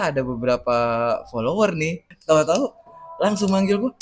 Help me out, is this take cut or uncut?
cut